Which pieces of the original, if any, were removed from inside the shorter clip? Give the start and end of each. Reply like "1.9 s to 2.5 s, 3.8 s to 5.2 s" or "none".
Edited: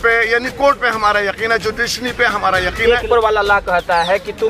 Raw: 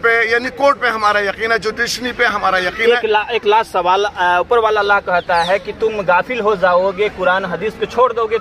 3.0 s to 4.4 s